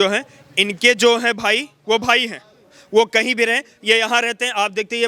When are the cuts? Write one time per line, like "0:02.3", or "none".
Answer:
none